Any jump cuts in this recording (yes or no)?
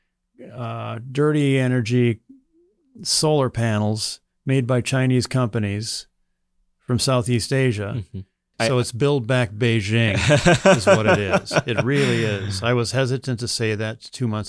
yes